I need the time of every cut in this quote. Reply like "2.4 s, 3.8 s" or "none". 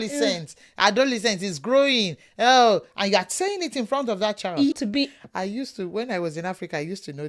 4.7 s